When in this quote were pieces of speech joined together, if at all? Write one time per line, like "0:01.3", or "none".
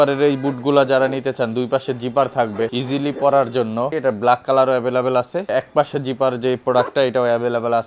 0:02.7
0:03.9
0:05.5

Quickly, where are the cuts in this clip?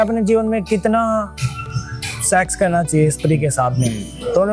none

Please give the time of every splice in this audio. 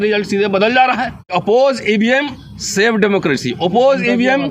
0:01.2

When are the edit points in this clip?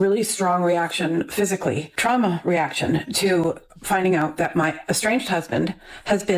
none

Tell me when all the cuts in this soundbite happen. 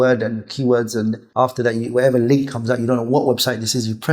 0:01.2

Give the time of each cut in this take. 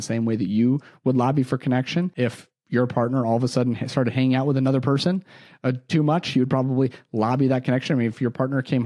0:02.1

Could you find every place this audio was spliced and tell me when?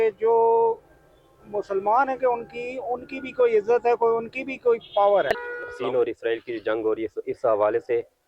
0:05.8

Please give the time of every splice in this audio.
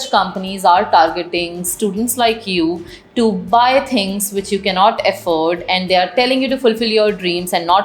none

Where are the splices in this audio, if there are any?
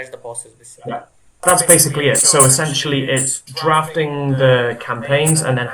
0:01.2

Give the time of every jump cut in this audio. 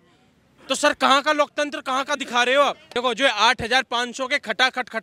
0:02.8

